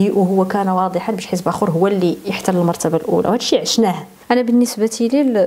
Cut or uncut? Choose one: cut